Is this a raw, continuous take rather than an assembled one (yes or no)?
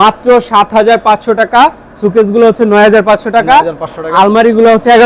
yes